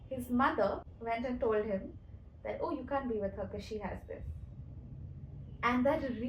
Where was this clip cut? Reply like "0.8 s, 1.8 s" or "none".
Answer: 0.9 s